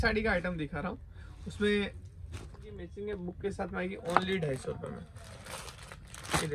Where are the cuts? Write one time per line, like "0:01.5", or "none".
0:02.9